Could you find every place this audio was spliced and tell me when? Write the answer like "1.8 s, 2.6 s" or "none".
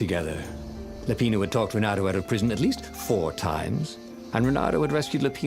none